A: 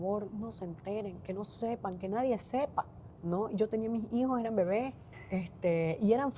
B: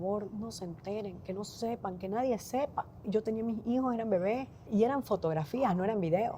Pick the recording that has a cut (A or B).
B